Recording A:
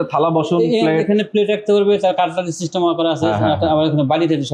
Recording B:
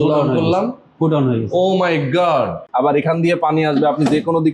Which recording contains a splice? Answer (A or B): B